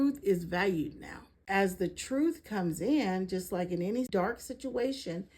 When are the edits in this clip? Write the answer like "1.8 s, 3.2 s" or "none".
1.4 s, 4.1 s